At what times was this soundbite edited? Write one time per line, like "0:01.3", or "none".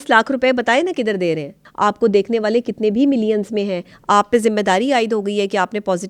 0:01.6